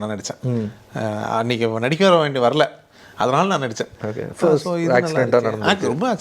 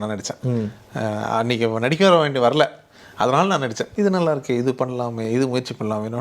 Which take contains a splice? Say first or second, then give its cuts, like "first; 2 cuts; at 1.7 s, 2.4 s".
second; 1 cut; at 3.9 s